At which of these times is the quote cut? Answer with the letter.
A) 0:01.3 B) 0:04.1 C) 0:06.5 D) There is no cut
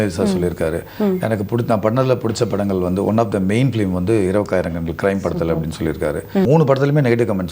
C